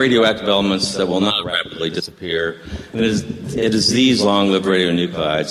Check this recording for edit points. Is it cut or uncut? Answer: cut